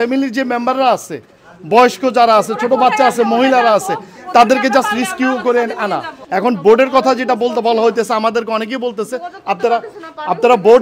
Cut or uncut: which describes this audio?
cut